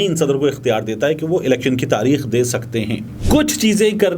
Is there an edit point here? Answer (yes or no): yes